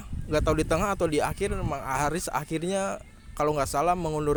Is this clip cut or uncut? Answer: uncut